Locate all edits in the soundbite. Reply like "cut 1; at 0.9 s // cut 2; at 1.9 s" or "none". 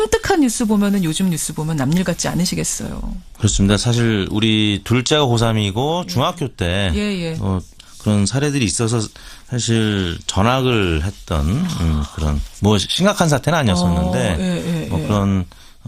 none

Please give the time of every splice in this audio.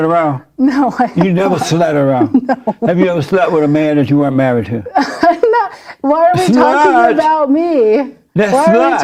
none

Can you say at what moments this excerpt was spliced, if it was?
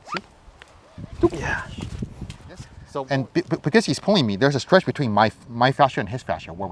cut 1; at 2.8 s

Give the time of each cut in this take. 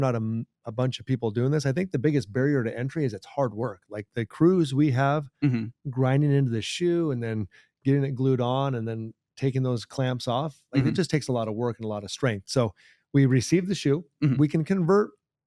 none

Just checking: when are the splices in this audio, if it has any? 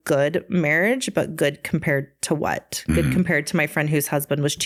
none

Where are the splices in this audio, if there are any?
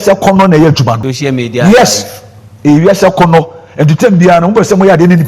cut 1; at 1.1 s

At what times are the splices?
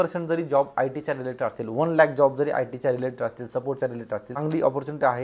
cut 1; at 4.3 s

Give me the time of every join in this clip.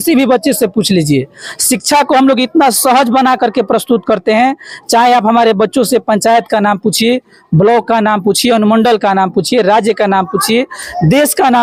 none

